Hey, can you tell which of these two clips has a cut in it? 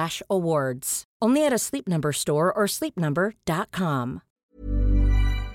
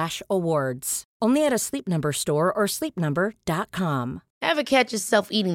second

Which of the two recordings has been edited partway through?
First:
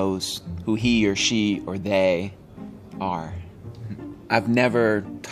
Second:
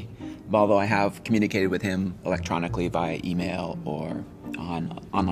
first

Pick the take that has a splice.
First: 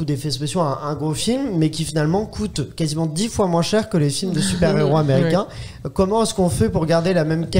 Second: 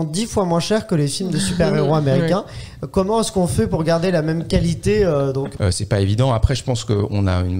second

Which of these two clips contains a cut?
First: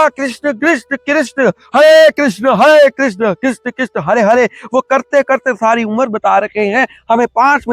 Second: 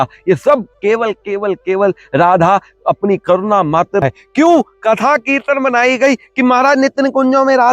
second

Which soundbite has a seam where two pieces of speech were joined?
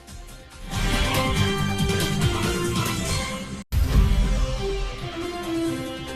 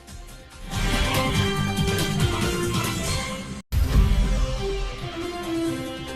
first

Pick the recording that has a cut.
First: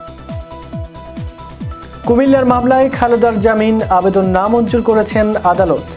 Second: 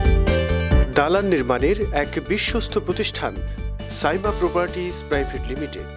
first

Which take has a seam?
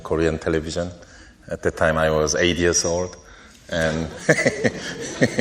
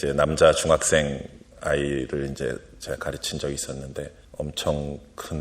second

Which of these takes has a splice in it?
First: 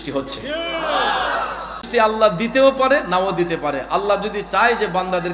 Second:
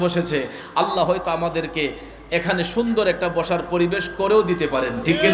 first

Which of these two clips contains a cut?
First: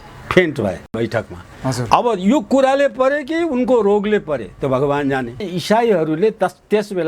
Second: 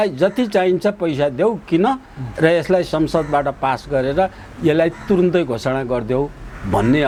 first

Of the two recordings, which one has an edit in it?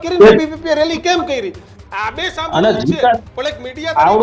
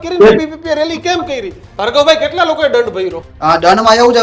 second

